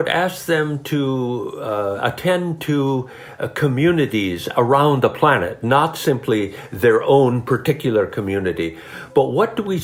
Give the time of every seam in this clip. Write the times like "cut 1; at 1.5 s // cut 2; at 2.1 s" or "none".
none